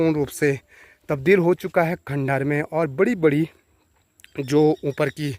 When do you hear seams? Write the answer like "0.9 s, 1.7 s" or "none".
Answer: none